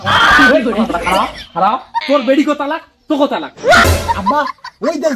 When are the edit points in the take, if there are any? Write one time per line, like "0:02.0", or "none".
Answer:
0:02.0
0:03.8